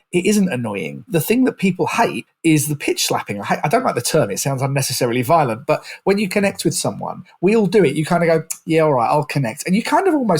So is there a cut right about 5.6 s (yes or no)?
no